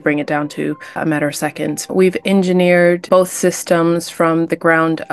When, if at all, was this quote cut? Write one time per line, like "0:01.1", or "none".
0:01.8
0:03.0